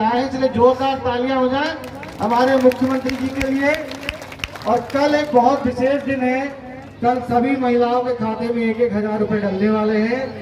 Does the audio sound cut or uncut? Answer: uncut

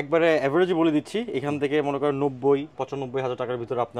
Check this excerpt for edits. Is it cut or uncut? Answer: uncut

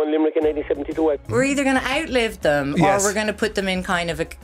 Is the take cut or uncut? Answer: cut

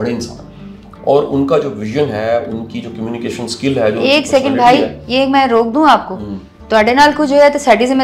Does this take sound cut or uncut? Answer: uncut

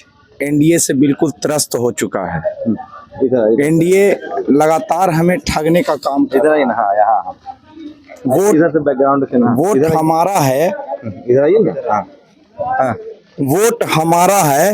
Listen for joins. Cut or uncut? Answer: uncut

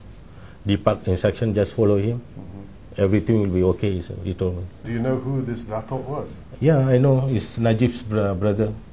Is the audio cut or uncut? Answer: cut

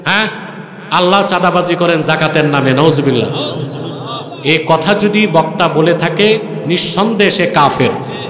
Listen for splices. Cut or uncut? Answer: uncut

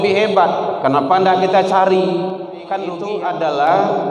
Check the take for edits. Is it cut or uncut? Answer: cut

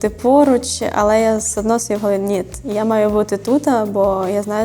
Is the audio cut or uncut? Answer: uncut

